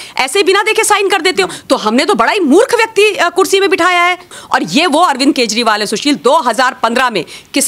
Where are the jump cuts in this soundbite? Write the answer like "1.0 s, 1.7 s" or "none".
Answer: 4.4 s